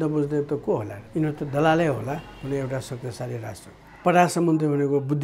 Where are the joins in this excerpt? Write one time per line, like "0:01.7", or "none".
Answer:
0:01.0
0:04.0